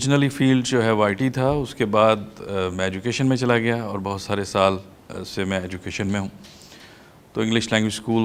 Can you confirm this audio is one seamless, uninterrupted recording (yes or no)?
yes